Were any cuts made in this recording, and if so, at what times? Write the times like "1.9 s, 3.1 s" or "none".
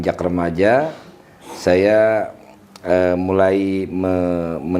none